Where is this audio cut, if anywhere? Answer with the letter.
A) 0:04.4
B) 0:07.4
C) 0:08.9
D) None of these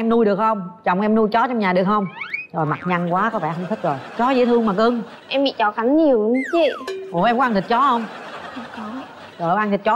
D